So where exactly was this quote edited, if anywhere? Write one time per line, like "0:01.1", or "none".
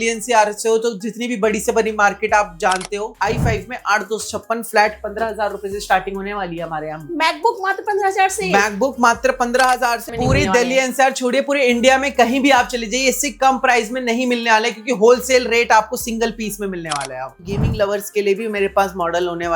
0:03.1
0:10.1
0:17.3